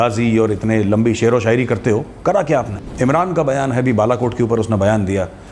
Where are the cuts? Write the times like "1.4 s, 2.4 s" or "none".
2.8 s